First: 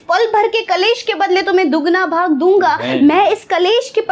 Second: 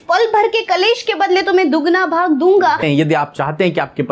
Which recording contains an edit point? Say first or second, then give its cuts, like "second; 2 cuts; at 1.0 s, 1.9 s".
second; 1 cut; at 2.8 s